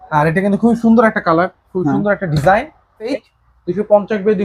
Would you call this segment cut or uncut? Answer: cut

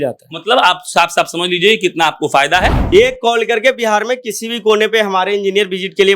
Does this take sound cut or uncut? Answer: cut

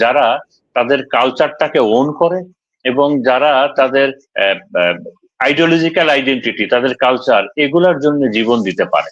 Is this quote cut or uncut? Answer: uncut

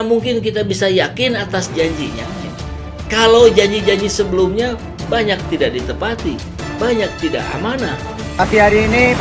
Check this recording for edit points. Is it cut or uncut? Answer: cut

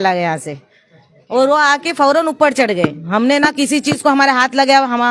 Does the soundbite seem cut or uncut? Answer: uncut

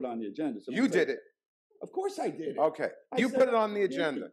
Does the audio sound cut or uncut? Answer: uncut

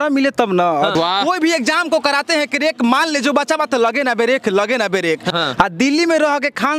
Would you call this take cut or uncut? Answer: cut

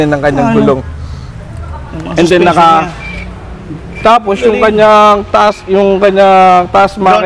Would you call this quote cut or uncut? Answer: uncut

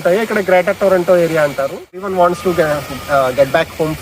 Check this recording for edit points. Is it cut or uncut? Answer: cut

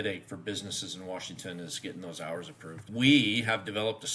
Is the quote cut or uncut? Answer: cut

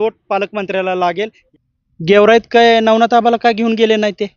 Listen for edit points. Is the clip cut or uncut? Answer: cut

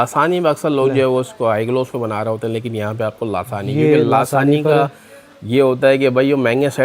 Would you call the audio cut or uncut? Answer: uncut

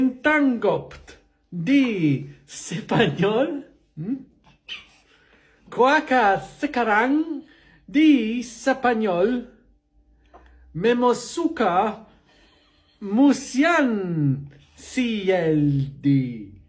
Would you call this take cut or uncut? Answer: uncut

